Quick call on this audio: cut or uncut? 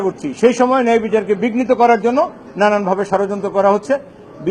uncut